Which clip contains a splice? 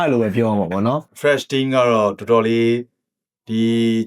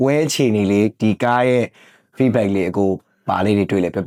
first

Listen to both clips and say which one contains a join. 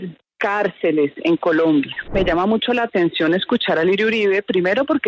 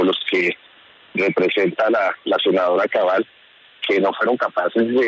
first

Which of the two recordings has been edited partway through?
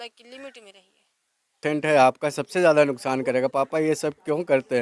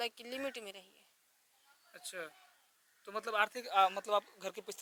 first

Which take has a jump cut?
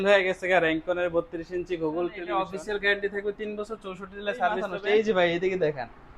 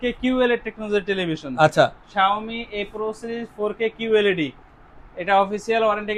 first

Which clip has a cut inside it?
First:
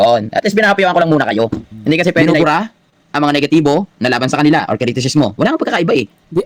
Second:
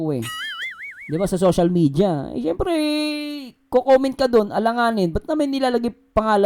first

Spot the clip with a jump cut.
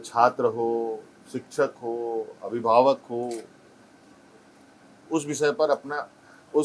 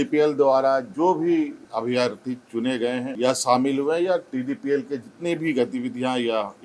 second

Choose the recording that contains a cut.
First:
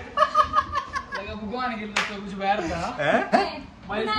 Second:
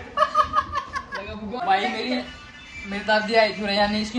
second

